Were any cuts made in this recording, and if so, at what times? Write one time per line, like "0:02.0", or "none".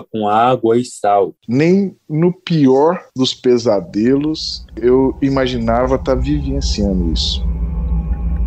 0:01.4
0:07.3